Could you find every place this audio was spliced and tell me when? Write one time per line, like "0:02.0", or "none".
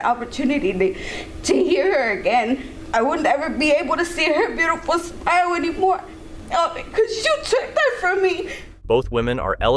none